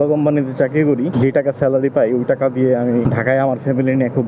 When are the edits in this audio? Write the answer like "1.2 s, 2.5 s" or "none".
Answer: 1.1 s, 3.1 s